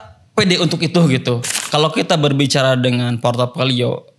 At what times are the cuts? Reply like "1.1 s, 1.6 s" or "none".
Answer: 1.5 s

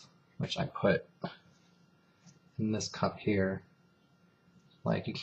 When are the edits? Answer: 1.1 s

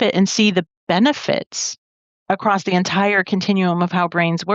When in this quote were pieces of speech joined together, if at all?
none

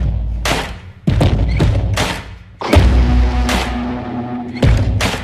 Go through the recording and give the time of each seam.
none

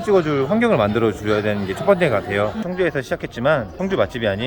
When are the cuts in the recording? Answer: 2.6 s

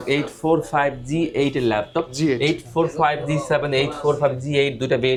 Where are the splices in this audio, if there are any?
none

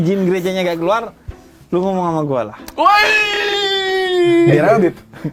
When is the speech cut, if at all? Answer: none

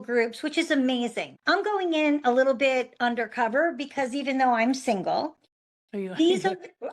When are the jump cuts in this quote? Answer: 1.3 s

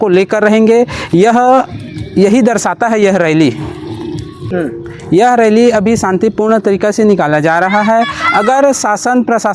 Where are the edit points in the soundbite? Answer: none

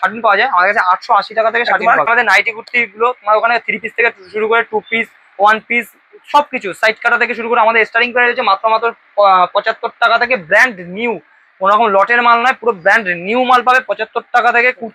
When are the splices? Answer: 2.1 s

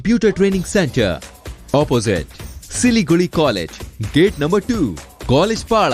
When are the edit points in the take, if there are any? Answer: none

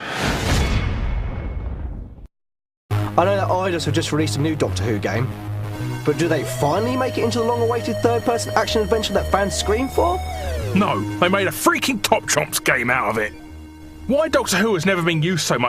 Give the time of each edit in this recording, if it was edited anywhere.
3.0 s

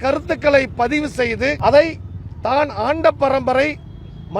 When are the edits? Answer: 1.6 s

